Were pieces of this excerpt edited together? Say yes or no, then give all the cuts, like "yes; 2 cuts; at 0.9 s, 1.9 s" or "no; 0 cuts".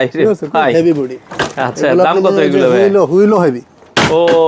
no; 0 cuts